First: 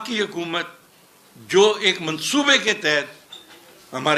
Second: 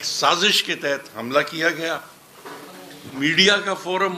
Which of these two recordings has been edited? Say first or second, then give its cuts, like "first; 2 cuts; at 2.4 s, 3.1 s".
second; 1 cut; at 3.1 s